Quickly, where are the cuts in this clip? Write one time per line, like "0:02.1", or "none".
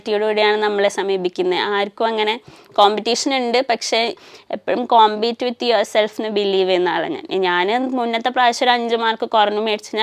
0:04.2